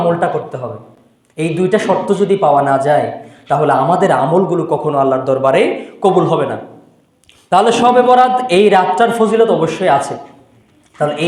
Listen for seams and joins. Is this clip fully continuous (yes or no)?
yes